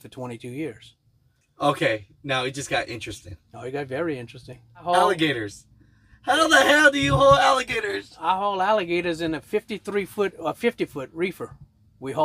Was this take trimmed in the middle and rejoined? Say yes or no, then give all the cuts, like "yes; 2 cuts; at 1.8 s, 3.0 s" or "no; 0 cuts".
yes; 1 cut; at 4.8 s